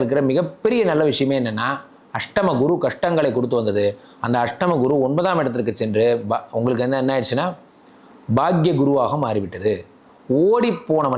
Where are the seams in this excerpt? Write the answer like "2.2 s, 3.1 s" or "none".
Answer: none